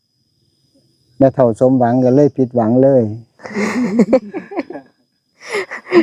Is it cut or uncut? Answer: uncut